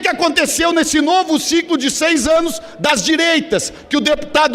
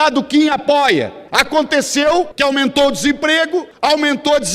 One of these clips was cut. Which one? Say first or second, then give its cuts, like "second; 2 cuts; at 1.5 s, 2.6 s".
second; 3 cuts; at 1.2 s, 2.3 s, 3.7 s